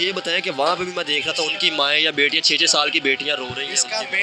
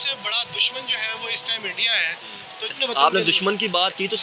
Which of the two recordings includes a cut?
second; 1 cut; at 2.7 s

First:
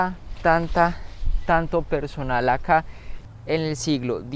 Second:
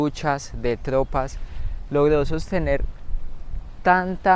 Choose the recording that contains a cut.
first; 1 cut; at 3.2 s

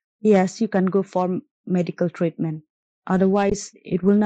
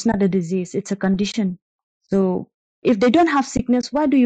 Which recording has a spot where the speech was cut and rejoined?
second; 1 cut; at 2.3 s

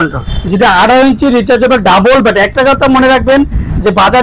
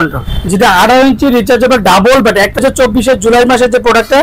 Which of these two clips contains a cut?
second; 1 cut; at 2.6 s

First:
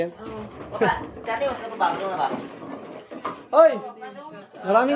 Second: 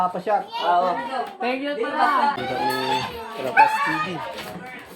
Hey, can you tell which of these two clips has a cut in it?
second; 1 cut; at 2.4 s

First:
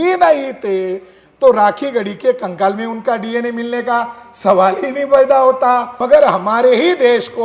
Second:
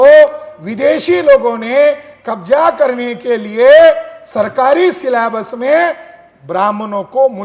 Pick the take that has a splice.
first; 1 cut; at 5.9 s

